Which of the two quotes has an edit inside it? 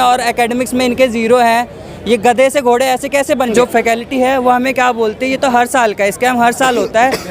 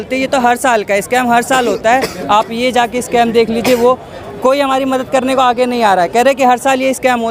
first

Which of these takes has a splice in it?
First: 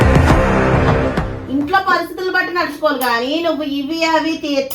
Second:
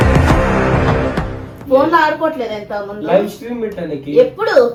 first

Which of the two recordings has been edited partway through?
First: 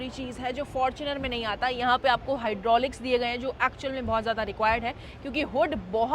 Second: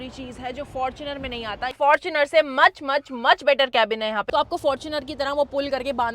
second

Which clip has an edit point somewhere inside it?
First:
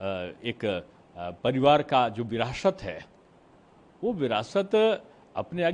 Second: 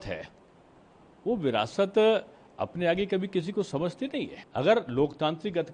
second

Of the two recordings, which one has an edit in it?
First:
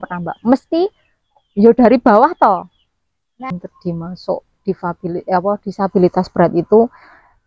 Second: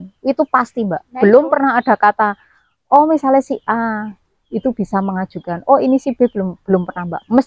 first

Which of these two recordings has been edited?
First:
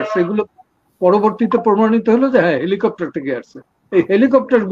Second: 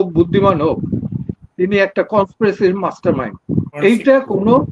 second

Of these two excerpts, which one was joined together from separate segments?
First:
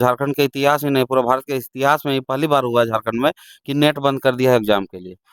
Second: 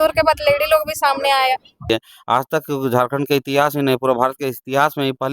second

